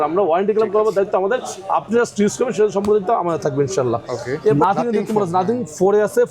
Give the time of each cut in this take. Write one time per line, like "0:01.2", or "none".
0:04.6